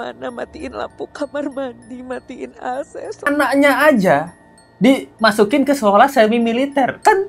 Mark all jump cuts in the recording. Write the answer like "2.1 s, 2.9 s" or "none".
3.3 s